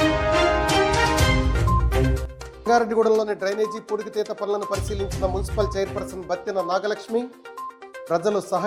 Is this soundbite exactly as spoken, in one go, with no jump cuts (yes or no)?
yes